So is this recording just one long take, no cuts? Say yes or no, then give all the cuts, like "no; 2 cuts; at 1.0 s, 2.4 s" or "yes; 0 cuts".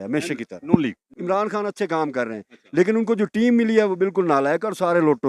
no; 1 cut; at 1.1 s